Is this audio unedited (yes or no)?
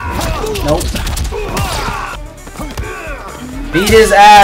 no